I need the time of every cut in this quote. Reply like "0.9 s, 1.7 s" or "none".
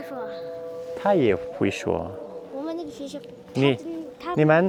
none